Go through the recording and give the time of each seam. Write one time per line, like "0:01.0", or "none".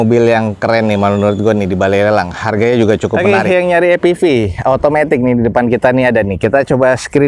0:03.2